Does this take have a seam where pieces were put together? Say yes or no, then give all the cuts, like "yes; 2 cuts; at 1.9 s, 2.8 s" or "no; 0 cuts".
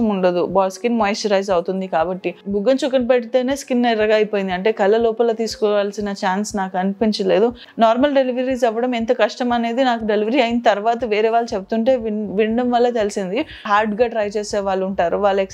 yes; 3 cuts; at 2.4 s, 7.6 s, 13.6 s